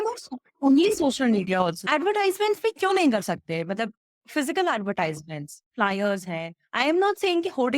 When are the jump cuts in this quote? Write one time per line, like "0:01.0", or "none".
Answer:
0:01.8

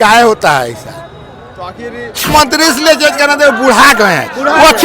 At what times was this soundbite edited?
0:02.2

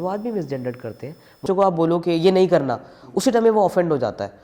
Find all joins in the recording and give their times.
0:01.4

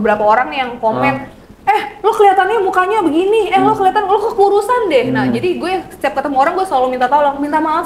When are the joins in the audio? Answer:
none

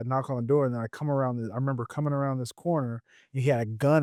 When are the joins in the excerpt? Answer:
none

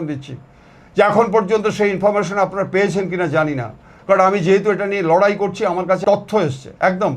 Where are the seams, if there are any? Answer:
0:06.0

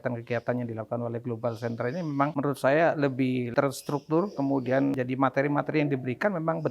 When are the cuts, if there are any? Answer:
0:02.3
0:03.5
0:05.0

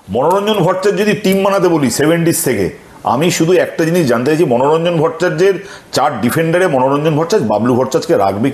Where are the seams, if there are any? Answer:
none

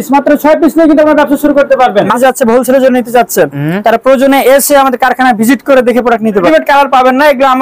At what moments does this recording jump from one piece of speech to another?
0:02.2
0:06.5

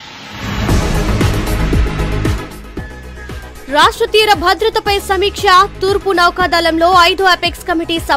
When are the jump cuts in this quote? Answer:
0:01.9

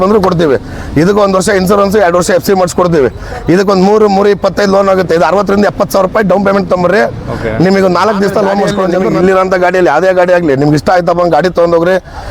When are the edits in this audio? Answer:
0:09.0

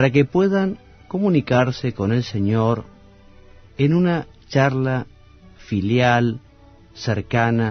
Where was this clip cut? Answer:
none

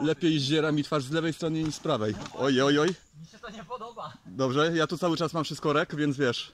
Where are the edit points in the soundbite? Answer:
none

